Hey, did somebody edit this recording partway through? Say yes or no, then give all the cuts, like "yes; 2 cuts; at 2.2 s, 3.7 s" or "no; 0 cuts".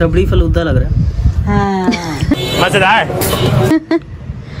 no; 0 cuts